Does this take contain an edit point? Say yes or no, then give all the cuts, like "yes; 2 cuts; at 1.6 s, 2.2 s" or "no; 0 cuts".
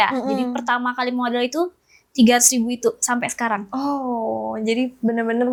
no; 0 cuts